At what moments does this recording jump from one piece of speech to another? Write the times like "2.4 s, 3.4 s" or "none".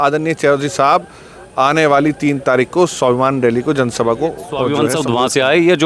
4.7 s